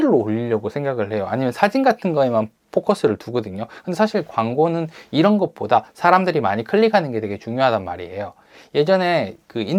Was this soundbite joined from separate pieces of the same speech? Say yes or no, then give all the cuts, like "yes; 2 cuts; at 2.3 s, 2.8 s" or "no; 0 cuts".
no; 0 cuts